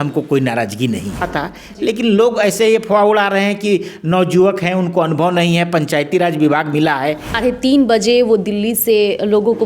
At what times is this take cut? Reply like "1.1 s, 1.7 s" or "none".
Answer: 1.3 s, 7.3 s